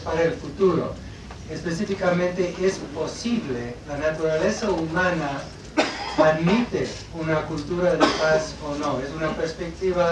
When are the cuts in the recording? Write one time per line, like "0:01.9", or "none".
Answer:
none